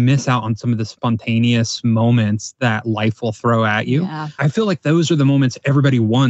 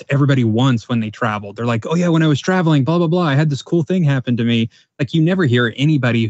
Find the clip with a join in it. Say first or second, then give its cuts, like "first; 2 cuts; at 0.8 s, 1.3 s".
first; 2 cuts; at 0.9 s, 4.4 s